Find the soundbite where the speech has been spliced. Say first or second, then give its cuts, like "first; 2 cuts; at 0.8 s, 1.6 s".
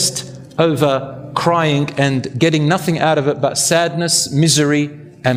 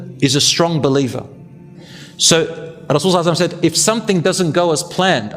second; 1 cut; at 1.6 s